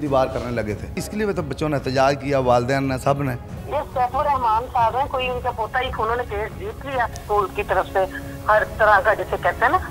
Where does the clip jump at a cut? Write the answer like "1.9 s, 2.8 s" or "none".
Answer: 1.0 s, 3.5 s, 5.9 s, 7.2 s

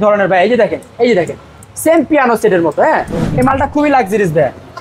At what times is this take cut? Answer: 3.2 s

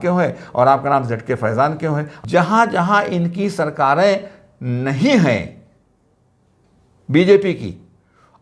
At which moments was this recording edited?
2.1 s

